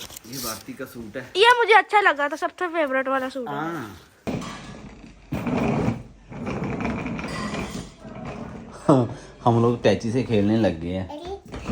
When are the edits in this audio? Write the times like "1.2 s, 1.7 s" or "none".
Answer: 4.3 s

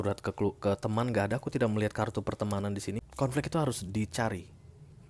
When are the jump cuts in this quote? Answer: 3.1 s

